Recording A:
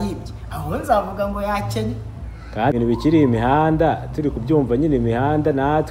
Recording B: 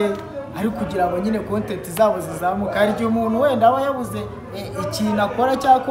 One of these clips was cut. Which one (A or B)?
A